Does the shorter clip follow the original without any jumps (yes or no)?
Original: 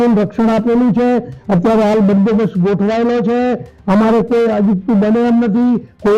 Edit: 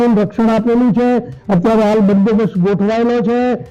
yes